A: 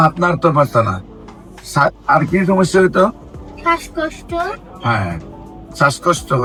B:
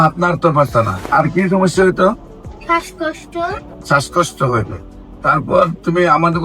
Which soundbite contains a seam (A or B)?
B